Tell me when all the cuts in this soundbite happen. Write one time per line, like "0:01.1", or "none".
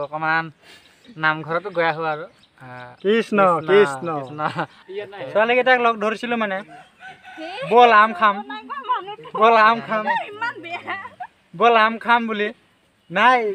0:04.7